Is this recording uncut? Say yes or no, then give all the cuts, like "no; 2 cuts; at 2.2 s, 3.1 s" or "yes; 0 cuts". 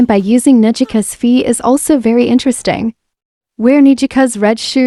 yes; 0 cuts